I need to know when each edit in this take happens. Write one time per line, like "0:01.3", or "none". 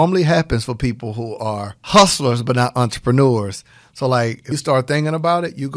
0:01.7
0:04.5